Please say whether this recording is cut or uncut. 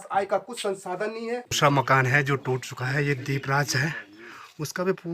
cut